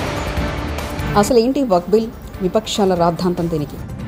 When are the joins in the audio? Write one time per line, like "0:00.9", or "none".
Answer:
0:01.0